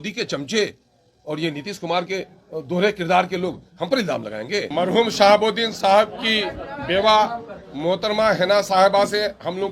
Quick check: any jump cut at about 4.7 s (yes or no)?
yes